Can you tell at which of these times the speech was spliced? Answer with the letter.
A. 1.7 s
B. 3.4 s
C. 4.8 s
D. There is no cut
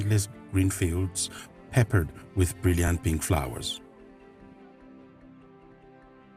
D